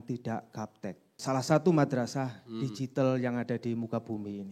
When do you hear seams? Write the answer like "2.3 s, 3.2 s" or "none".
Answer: 1.2 s